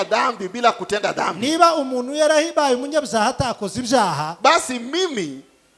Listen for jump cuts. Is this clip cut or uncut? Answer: uncut